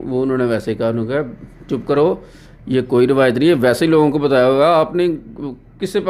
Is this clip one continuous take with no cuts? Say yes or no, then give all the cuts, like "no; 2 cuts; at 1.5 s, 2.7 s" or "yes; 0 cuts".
yes; 0 cuts